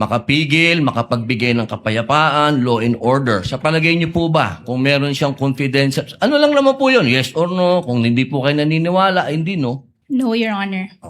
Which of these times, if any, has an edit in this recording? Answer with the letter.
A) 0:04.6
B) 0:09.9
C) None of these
B